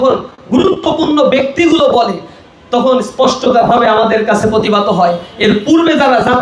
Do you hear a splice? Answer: no; 0 cuts

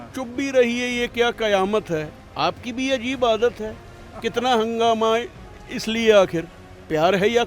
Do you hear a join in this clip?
no; 0 cuts

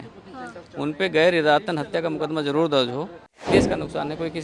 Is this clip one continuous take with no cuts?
no; 1 cut; at 3.4 s

